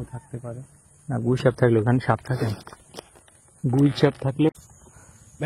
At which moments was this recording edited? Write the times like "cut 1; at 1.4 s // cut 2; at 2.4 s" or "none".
cut 1; at 4.5 s